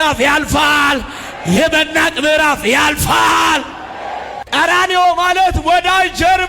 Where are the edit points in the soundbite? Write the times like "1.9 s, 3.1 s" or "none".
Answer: 4.4 s

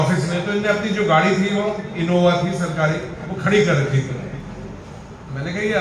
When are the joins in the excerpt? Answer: none

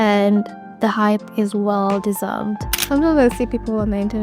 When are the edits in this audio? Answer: 2.7 s

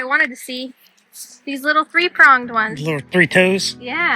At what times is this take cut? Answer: none

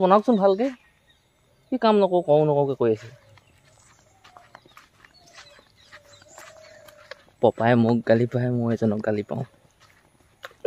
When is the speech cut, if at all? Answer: none

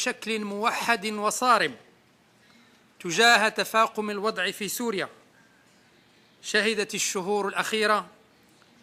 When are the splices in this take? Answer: none

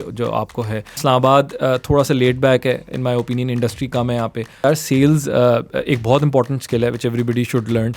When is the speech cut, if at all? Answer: 0.9 s, 4.6 s

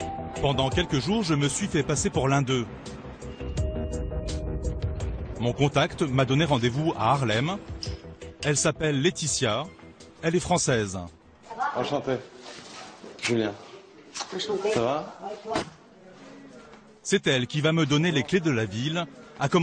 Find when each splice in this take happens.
none

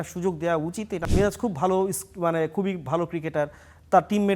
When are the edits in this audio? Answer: 1.0 s

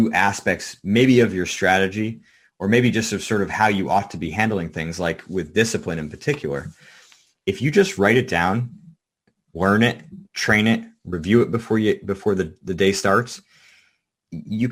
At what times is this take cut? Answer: none

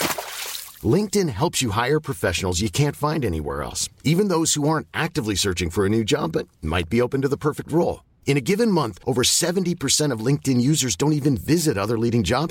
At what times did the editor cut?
none

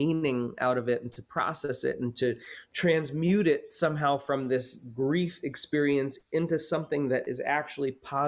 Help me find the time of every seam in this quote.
none

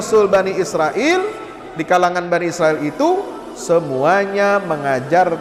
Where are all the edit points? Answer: none

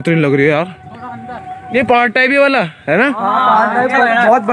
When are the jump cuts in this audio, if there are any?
1.7 s

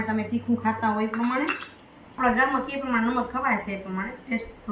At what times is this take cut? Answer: 2.2 s

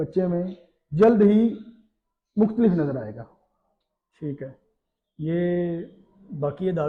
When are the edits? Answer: none

